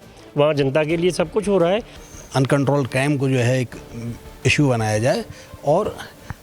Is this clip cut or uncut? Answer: cut